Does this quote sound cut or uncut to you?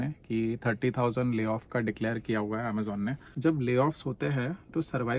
cut